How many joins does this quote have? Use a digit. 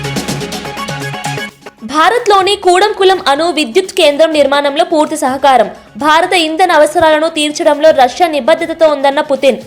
1